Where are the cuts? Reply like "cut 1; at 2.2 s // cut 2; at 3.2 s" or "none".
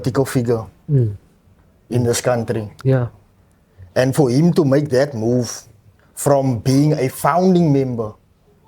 none